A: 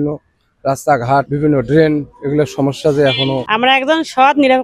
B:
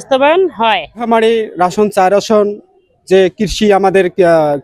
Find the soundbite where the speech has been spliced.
A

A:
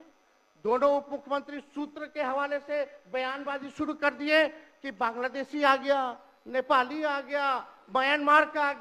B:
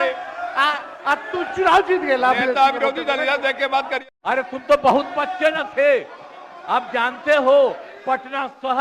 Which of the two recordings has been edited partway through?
B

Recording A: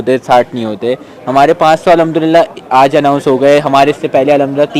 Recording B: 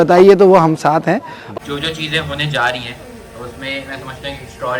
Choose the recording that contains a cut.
B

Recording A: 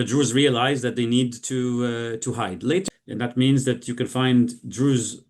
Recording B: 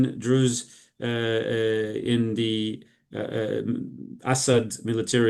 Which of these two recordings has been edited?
A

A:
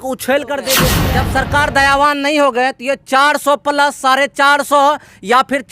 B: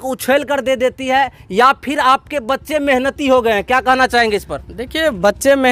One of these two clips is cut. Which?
A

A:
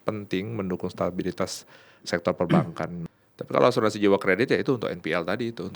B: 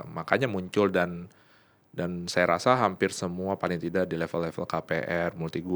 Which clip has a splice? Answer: A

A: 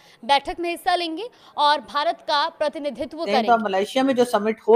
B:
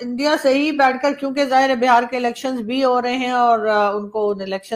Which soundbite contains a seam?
A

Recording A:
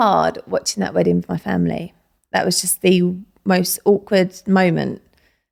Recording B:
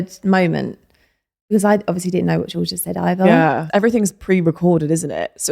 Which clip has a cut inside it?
B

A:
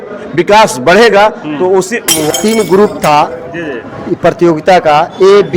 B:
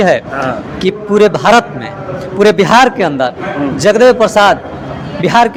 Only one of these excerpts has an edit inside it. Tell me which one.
A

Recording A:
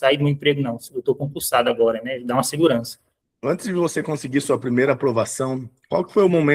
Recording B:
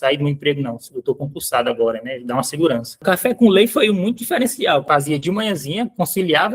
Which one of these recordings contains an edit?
B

